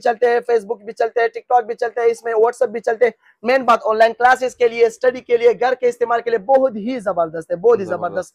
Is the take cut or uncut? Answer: uncut